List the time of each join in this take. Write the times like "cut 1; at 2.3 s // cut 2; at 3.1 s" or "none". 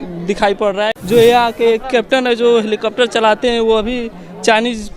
cut 1; at 0.9 s